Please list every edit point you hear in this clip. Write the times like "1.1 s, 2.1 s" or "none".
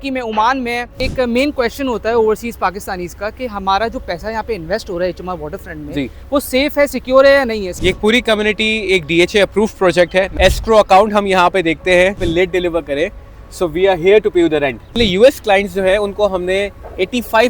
1.0 s, 7.7 s, 10.3 s, 12.2 s, 15.0 s

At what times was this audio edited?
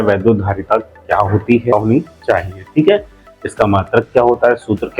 1.7 s

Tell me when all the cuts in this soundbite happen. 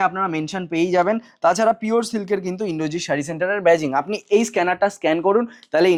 none

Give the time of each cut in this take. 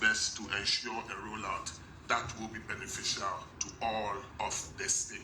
3.6 s, 4.3 s

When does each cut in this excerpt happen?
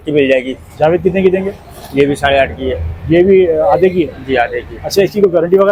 none

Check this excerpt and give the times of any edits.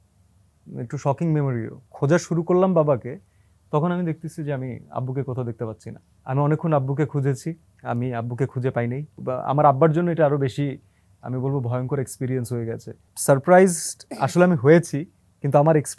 1.8 s, 6.1 s, 7.7 s, 9.2 s, 13.1 s

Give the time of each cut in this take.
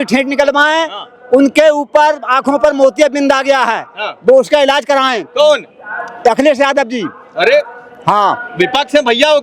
none

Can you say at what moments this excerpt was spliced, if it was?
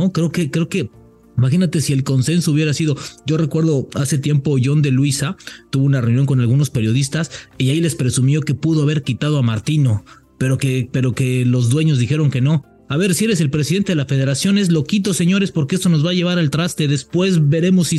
none

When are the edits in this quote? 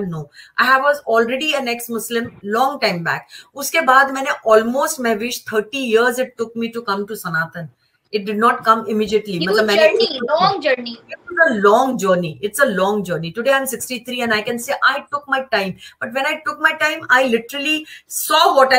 none

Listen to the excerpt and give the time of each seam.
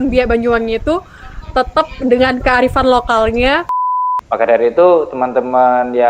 3.8 s

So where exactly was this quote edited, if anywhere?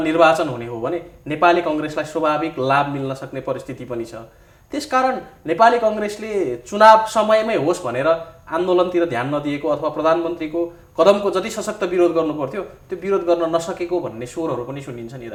none

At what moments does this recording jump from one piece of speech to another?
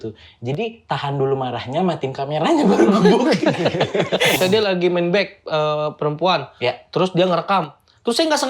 4.4 s

